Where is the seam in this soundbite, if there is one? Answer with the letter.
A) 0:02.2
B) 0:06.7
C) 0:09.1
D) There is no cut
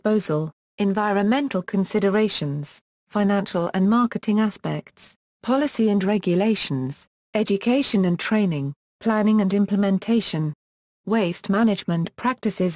B